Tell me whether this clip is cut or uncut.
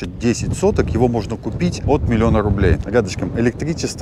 cut